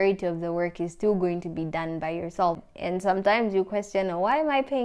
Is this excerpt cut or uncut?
cut